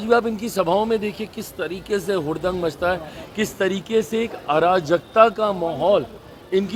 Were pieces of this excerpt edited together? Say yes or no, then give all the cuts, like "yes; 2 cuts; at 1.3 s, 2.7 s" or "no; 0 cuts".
no; 0 cuts